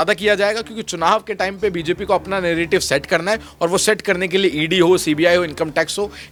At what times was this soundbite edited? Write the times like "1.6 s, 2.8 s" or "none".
none